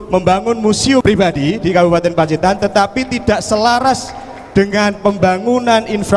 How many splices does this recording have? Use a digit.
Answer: 1